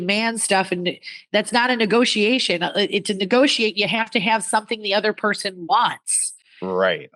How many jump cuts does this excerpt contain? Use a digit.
0